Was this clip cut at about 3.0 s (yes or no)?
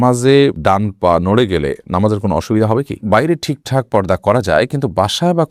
yes